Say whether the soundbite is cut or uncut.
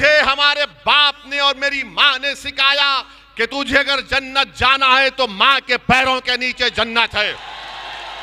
uncut